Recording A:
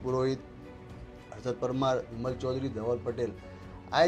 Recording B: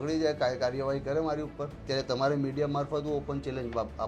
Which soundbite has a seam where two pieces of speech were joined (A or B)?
B